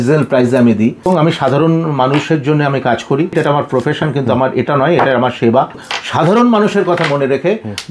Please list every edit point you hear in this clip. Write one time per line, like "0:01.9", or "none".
0:01.0
0:03.3
0:05.9

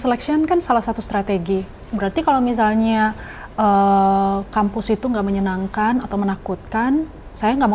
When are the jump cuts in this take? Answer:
none

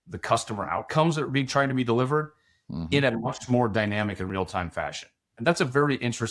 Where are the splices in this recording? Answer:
0:05.4

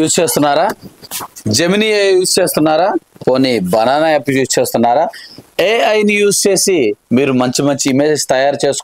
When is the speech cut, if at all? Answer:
none

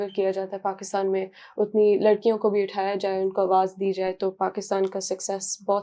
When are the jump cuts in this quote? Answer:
none

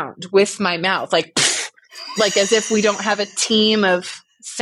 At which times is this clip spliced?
none

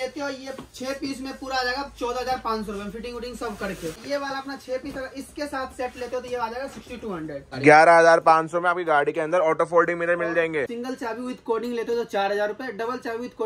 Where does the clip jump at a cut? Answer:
0:04.0
0:07.5
0:10.7

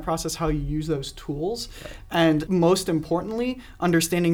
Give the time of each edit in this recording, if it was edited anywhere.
0:02.5

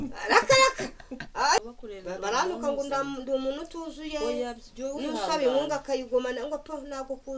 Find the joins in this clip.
0:01.6

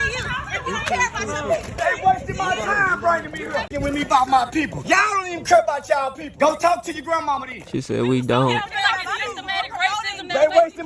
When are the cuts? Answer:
0:01.8
0:03.7
0:04.8
0:06.2

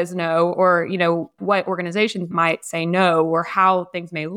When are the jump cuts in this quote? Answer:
0:01.4
0:02.3

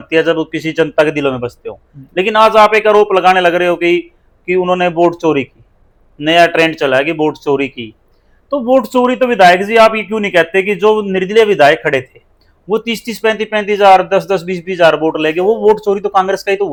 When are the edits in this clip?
none

